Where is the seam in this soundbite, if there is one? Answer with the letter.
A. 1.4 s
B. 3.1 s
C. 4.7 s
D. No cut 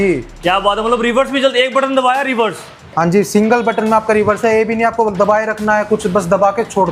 D